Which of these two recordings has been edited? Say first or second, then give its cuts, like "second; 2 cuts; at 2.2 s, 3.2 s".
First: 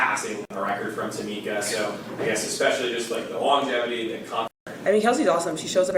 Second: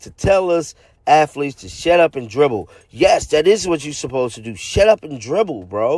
first; 1 cut; at 4.6 s